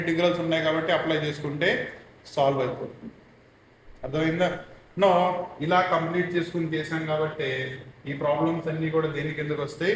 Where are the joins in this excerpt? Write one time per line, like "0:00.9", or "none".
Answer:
none